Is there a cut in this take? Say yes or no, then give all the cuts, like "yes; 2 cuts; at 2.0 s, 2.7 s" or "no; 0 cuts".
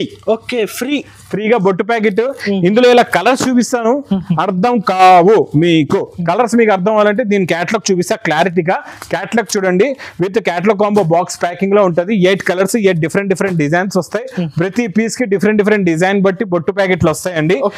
no; 0 cuts